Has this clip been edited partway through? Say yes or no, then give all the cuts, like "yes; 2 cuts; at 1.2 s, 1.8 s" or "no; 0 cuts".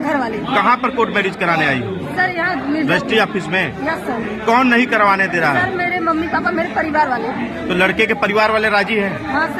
no; 0 cuts